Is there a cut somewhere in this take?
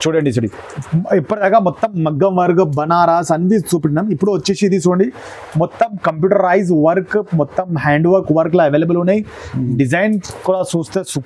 no; 0 cuts

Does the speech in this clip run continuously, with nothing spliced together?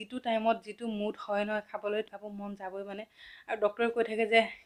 yes; 0 cuts

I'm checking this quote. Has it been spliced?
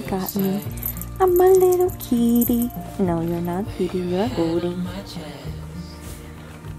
no; 0 cuts

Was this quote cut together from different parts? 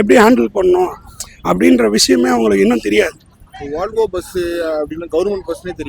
no; 0 cuts

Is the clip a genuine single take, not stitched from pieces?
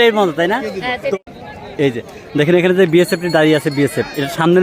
no; 1 cut; at 1.2 s

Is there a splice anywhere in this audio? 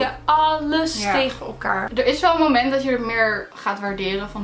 yes; 1 cut; at 1.9 s

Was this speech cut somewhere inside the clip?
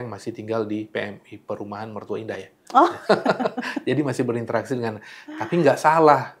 no; 0 cuts

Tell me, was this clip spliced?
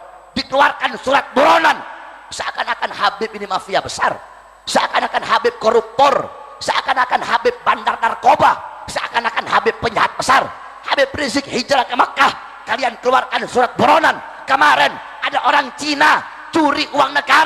no; 0 cuts

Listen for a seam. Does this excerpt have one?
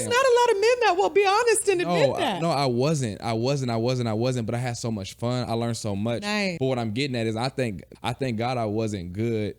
yes; 2 cuts; at 6.5 s, 7.9 s

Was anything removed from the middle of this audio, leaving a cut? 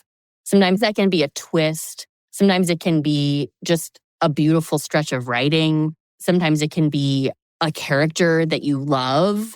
yes; 3 cuts; at 4.0 s, 6.1 s, 7.5 s

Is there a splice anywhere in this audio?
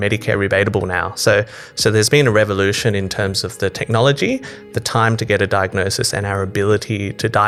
no; 0 cuts

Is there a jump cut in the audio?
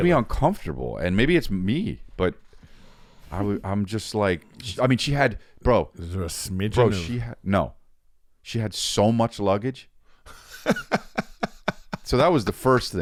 no; 0 cuts

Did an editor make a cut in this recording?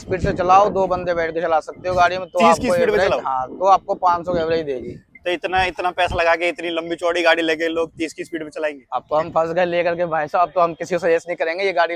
no; 0 cuts

